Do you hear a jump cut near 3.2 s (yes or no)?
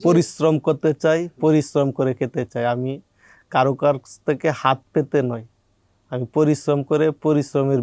no